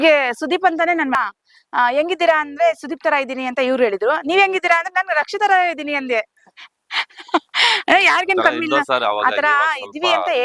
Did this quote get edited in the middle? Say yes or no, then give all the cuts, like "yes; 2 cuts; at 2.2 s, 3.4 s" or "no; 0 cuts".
yes; 1 cut; at 1.2 s